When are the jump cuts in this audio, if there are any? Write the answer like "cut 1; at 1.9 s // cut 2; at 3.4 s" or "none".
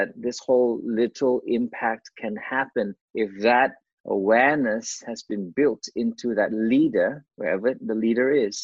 cut 1; at 3.0 s // cut 2; at 7.3 s